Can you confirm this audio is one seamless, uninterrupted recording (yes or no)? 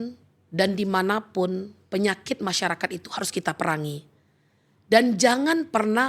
yes